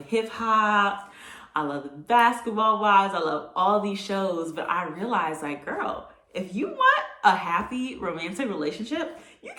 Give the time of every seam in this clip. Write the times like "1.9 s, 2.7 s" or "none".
none